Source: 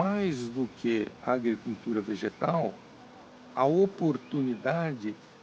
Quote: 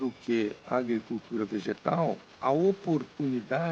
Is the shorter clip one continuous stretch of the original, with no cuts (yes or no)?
no